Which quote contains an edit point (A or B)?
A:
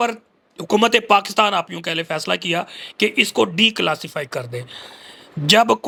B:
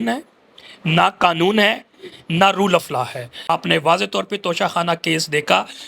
B